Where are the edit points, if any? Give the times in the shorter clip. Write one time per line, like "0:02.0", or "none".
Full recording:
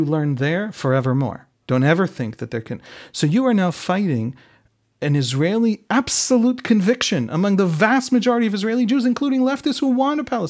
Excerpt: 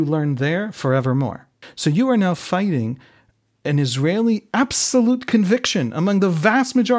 0:01.5